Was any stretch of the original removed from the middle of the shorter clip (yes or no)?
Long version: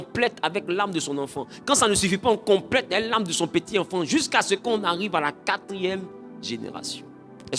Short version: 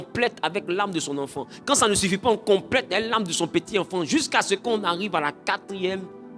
no